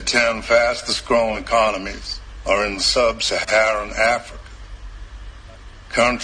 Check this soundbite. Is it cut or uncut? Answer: cut